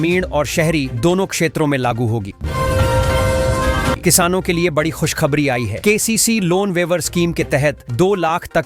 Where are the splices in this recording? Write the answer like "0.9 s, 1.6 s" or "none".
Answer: 2.3 s, 4.0 s